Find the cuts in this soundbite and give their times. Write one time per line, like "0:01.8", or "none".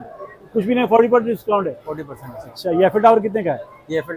none